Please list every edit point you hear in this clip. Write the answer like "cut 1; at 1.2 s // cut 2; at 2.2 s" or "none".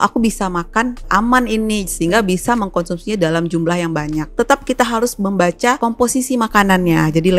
cut 1; at 1.1 s // cut 2; at 4.3 s // cut 3; at 5.8 s